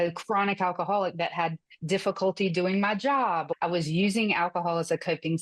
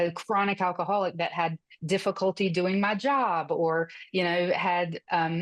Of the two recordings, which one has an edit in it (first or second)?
first